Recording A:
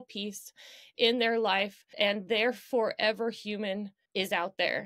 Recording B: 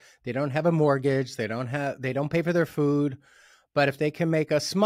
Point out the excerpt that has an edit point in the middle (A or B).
A